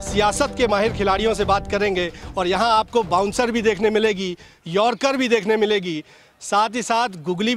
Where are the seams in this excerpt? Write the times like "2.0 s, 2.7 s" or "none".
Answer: none